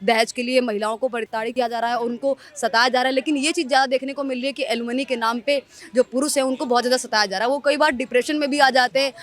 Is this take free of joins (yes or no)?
no